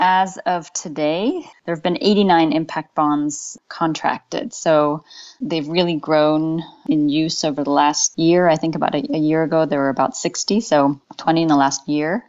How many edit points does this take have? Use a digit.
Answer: 1